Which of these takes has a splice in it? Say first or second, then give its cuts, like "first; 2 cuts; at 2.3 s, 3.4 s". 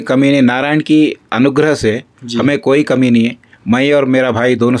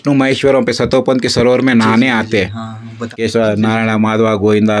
second; 1 cut; at 3.1 s